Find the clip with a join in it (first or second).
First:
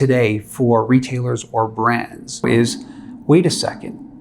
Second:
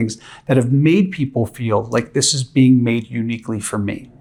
first